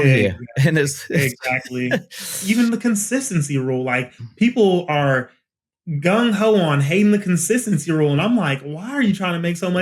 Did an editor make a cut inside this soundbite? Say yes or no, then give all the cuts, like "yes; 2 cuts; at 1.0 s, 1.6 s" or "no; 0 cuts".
yes; 1 cut; at 2.4 s